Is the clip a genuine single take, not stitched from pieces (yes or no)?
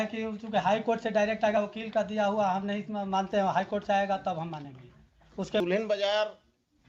no